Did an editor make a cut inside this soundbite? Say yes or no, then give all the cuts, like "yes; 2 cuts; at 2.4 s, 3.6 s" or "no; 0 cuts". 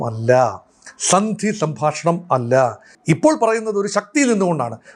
yes; 1 cut; at 2.9 s